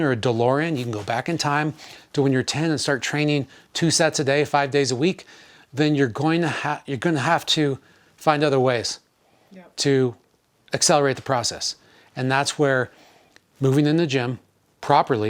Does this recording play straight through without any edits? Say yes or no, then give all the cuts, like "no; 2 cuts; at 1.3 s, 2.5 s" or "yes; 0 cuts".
yes; 0 cuts